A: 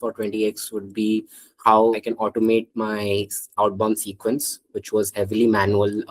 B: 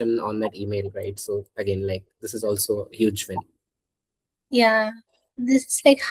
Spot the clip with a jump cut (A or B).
A